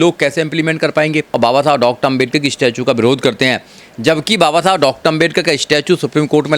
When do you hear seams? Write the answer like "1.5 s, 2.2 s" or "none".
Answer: 1.3 s